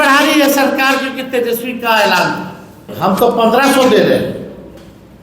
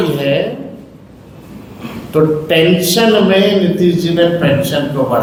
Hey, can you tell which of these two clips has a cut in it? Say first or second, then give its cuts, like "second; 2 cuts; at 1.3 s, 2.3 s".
first; 1 cut; at 2.9 s